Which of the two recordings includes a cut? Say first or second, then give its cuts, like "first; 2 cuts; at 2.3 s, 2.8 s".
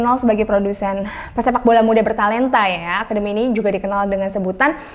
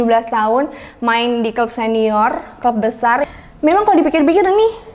second; 1 cut; at 3.3 s